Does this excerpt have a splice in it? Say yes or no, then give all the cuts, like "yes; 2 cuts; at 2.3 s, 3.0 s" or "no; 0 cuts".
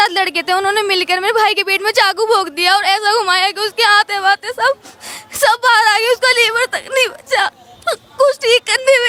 no; 0 cuts